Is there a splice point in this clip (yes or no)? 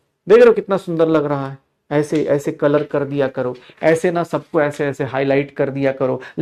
no